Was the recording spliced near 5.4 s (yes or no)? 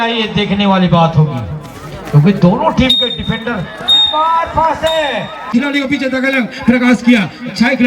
yes